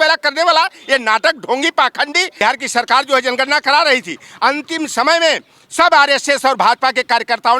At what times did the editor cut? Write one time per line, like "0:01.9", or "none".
0:02.4